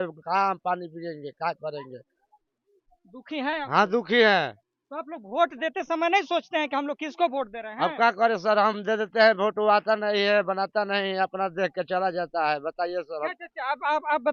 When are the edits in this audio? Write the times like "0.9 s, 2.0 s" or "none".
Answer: none

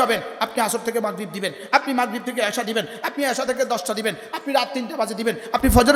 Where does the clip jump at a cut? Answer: none

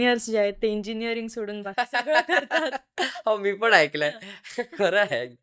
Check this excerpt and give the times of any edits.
none

